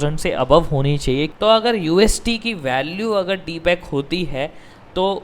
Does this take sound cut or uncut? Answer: cut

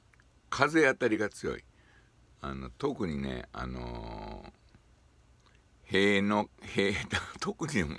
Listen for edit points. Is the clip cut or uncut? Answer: uncut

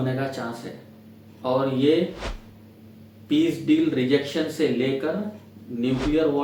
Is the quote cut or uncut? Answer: uncut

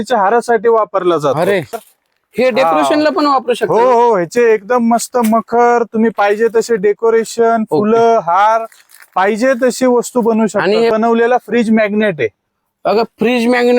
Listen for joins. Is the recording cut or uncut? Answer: cut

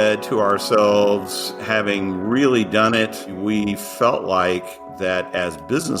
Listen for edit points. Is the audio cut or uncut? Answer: cut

